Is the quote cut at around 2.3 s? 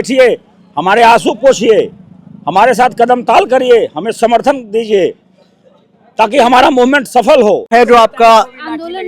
no; 1 cut; at 7.7 s

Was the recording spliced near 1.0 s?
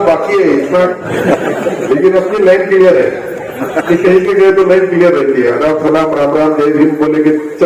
yes; 1 cut; at 1.0 s

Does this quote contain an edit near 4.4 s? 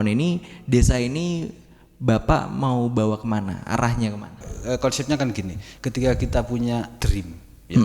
yes; 1 cut; at 4.4 s

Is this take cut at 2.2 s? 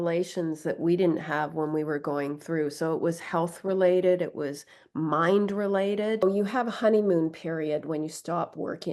no; 1 cut; at 6.2 s

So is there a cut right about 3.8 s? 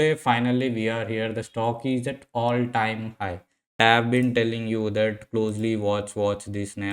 yes; 1 cut; at 3.8 s

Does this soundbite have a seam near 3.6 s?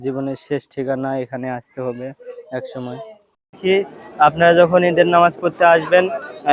yes; 1 cut; at 3.6 s

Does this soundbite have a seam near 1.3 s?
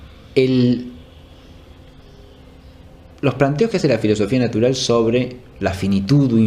no; 1 cut; at 3.5 s

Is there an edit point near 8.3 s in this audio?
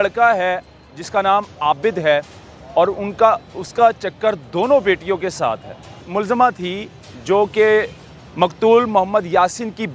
no; 1 cut; at 6.1 s

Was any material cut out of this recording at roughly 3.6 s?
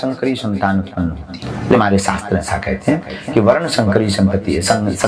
no; 1 cut; at 1.8 s

